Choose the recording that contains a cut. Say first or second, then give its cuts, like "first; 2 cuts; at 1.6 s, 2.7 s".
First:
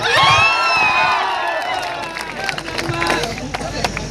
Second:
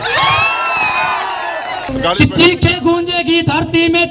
second; 1 cut; at 1.9 s